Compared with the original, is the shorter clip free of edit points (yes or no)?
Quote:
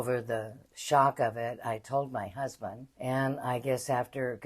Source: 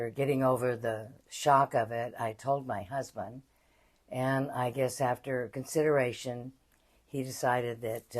no